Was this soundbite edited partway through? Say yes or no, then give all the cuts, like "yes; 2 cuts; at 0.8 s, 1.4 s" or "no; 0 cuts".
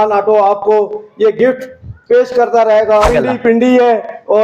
yes; 1 cut; at 3.1 s